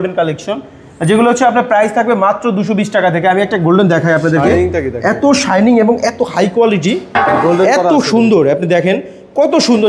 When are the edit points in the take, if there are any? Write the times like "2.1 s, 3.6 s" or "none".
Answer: none